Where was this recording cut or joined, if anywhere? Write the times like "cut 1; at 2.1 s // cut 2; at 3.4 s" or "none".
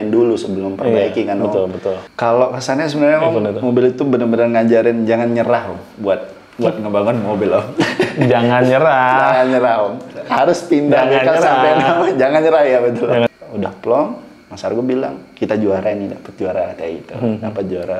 cut 1; at 2.1 s // cut 2; at 13.3 s